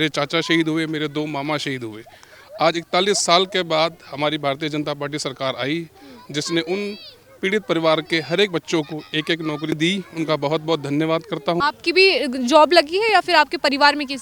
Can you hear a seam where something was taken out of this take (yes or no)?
yes